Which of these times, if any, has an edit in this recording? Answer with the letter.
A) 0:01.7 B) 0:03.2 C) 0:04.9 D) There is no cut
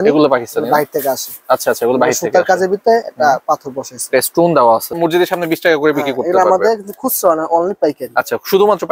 C